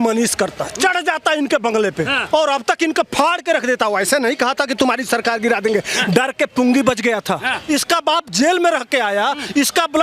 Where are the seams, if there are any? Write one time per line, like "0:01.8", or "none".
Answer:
0:02.2
0:07.5